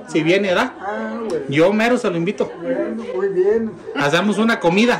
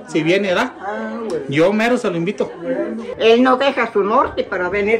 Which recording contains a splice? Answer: second; 1 cut; at 3.0 s

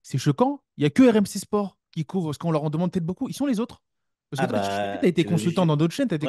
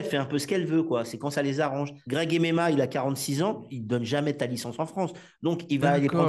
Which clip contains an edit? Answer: second; 2 cuts; at 2.0 s, 3.7 s

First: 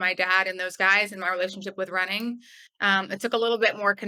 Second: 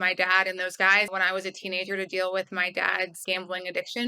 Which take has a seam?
second; 2 cuts; at 1.1 s, 3.2 s

